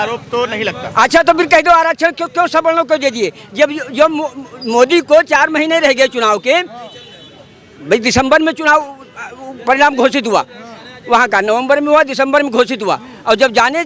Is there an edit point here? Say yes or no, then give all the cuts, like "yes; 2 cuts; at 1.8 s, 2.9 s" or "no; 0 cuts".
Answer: no; 0 cuts